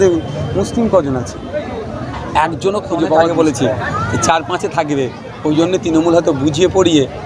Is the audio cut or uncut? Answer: cut